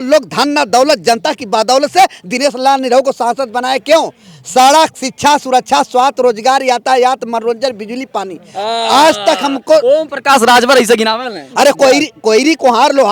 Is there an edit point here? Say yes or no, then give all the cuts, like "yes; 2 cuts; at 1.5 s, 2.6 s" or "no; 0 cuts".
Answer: no; 0 cuts